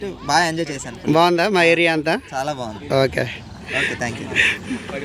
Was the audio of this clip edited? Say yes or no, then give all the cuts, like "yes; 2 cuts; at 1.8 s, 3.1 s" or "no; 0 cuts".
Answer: no; 0 cuts